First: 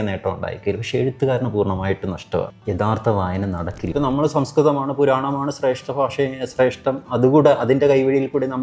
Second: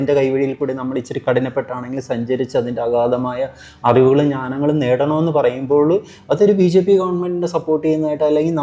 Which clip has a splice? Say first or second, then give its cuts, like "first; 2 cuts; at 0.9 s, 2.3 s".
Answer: first; 2 cuts; at 2.6 s, 3.8 s